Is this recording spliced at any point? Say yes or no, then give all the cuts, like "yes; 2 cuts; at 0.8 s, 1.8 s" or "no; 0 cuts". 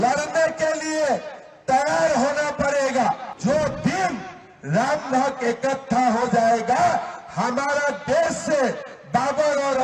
yes; 1 cut; at 3.3 s